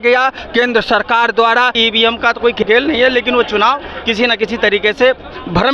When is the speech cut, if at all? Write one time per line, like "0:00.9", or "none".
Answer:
0:01.8